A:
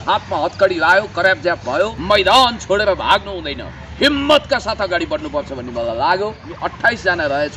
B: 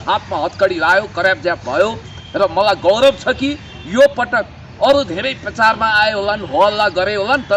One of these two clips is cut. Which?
A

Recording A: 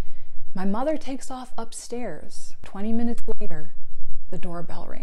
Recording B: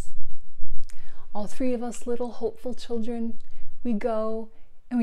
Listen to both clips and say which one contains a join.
A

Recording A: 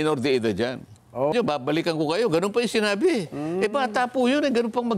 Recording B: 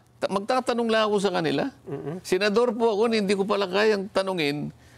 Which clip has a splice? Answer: A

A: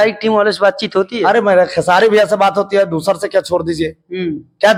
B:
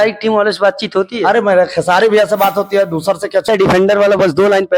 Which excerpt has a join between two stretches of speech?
B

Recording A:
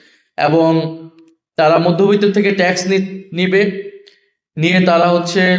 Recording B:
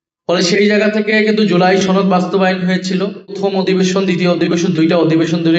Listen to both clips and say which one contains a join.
B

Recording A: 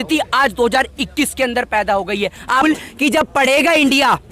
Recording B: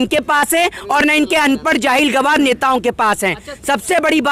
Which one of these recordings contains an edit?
A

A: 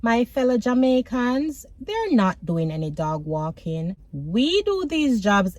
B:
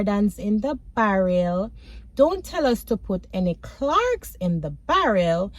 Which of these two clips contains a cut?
A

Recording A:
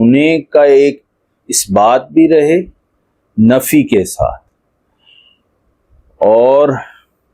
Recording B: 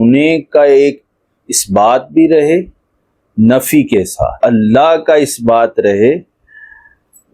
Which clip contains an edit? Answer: B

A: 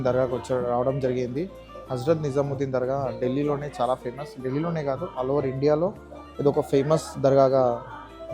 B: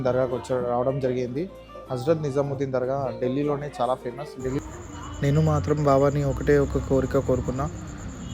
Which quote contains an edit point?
B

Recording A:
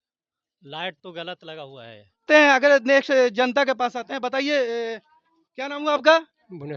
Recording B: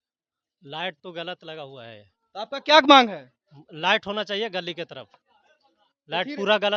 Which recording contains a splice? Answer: A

